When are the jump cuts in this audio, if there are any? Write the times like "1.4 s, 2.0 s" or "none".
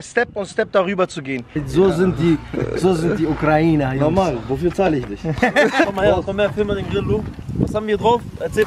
1.6 s, 5.8 s